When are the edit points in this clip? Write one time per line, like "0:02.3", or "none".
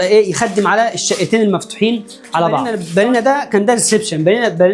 0:02.8